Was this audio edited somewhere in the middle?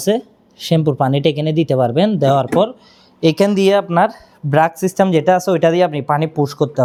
no; 0 cuts

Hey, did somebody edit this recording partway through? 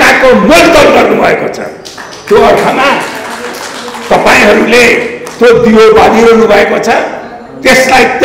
no; 0 cuts

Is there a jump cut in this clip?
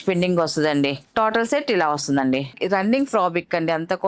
yes; 1 cut; at 2.5 s

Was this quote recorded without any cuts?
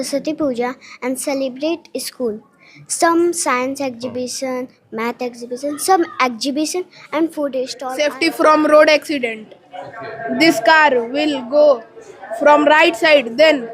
no; 1 cut; at 7.8 s

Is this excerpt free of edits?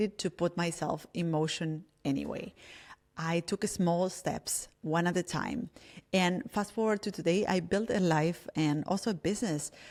yes; 0 cuts

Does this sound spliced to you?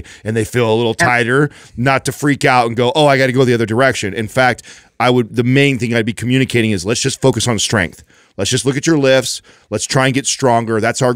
no; 0 cuts

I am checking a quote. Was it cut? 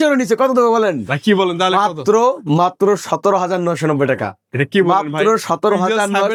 no; 0 cuts

